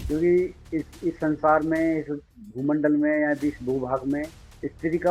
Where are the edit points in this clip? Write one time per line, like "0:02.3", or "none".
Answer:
none